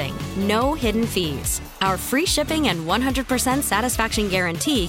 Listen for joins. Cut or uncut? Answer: uncut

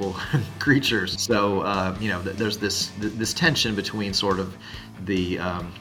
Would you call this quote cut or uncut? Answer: cut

